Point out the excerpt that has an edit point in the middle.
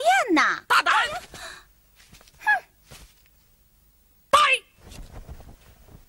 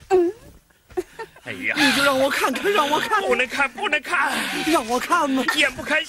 first; 1 cut; at 3.0 s

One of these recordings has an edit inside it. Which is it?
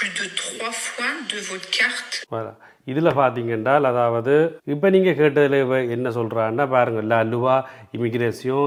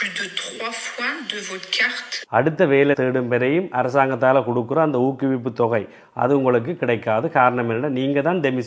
second; 1 cut; at 2.2 s

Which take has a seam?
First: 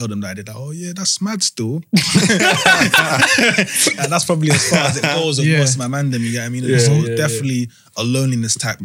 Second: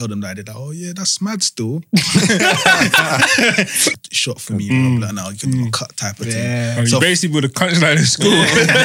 second; 1 cut; at 4.0 s

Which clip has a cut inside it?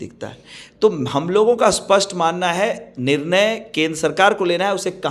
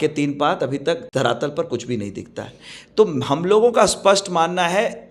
second; 1 cut; at 1.0 s

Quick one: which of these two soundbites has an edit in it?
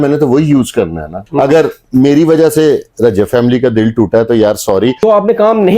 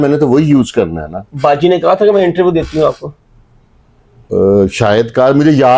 first; 2 cuts; at 1.2 s, 5.0 s

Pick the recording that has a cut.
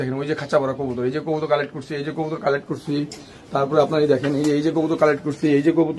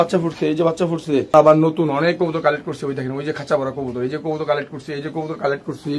second; 1 cut; at 1.3 s

